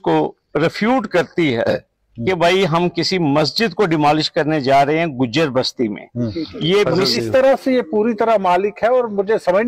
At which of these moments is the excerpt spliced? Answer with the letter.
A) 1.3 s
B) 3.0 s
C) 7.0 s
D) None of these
C